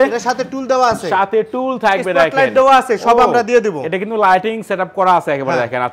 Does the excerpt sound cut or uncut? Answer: uncut